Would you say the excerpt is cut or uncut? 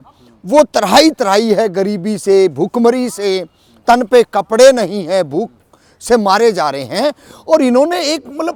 uncut